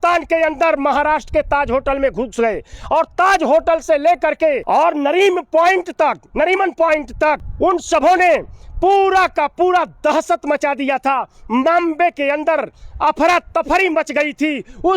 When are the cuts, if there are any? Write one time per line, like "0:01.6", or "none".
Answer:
0:04.6
0:07.5